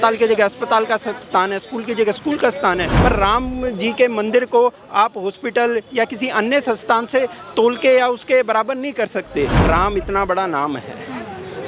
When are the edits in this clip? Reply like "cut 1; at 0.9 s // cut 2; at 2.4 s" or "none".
cut 1; at 2.9 s // cut 2; at 9.6 s